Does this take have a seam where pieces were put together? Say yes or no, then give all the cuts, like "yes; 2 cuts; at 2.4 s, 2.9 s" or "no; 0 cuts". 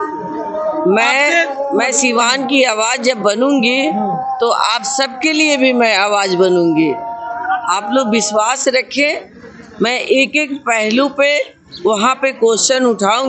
no; 0 cuts